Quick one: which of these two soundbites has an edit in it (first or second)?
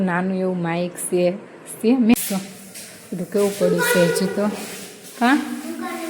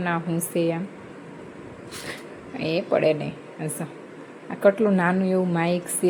first